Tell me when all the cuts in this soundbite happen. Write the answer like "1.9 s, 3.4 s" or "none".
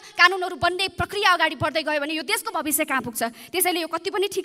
none